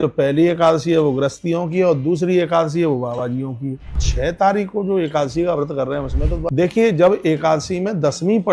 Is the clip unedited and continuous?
no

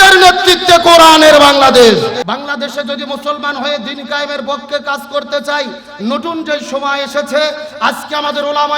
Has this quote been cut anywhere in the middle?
yes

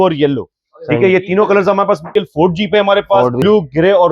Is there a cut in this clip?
yes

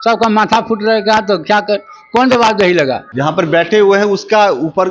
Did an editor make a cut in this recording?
yes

